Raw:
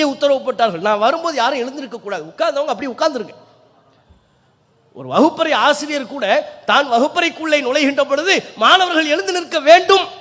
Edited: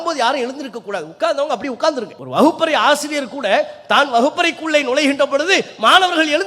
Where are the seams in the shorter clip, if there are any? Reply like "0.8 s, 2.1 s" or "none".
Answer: 2.2 s